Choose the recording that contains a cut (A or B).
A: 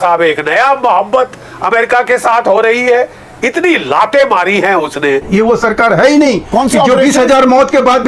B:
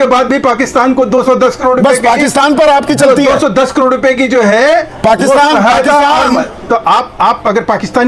A